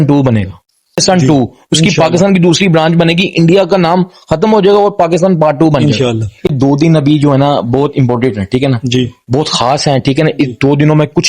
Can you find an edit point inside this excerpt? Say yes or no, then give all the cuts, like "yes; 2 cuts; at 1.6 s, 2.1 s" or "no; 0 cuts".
yes; 2 cuts; at 1.0 s, 6.5 s